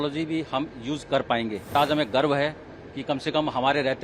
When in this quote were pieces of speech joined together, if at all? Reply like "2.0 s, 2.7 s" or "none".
1.7 s